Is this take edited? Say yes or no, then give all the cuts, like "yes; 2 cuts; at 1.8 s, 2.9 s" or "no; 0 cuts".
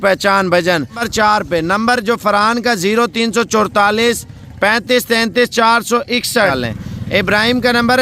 yes; 2 cuts; at 1.1 s, 6.5 s